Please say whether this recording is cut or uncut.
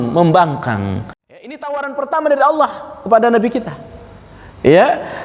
cut